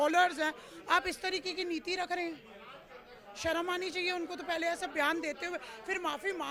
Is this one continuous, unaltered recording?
yes; 0 cuts

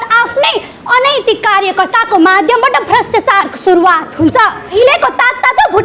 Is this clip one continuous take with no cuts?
no; 1 cut; at 4.6 s

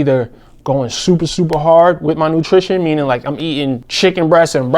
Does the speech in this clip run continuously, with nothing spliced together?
no; 1 cut; at 3.9 s

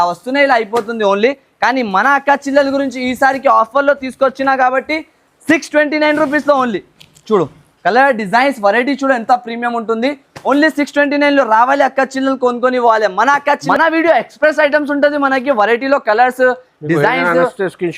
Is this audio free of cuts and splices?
no; 1 cut; at 13.6 s

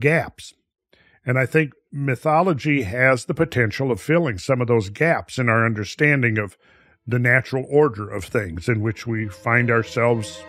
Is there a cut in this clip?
no; 0 cuts

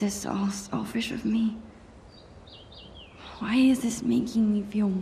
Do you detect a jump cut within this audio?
no; 0 cuts

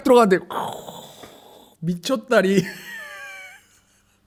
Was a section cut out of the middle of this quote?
no; 0 cuts

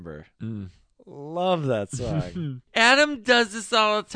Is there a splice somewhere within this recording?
yes; 1 cut; at 2.6 s

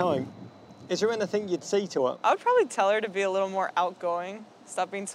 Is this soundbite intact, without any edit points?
no; 1 cut; at 2.2 s

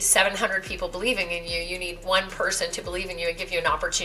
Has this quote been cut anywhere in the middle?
no; 0 cuts

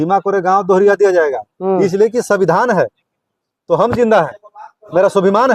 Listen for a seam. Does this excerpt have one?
no; 0 cuts

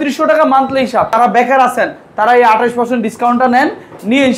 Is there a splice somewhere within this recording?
yes; 1 cut; at 1.2 s

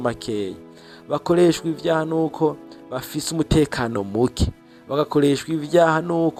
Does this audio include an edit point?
no; 0 cuts

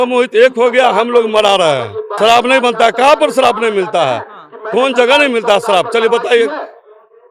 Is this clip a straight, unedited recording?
no; 1 cut; at 2.2 s

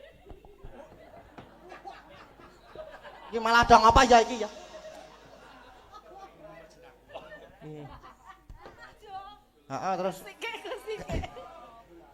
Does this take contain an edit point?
no; 0 cuts

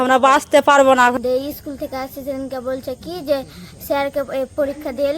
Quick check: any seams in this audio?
yes; 1 cut; at 1.1 s

